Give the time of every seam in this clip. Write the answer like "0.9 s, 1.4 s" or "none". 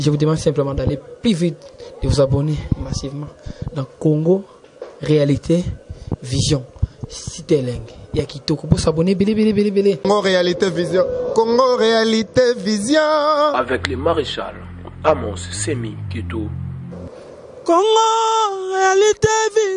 none